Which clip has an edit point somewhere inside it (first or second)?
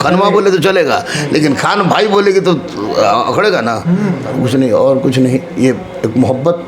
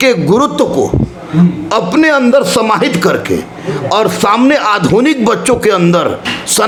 first